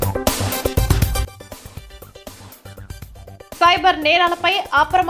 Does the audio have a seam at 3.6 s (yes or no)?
no